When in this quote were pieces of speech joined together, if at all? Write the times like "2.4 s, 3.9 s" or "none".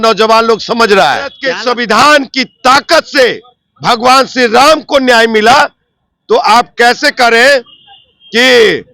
1.5 s